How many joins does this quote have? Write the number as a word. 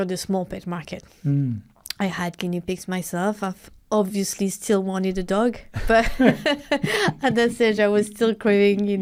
zero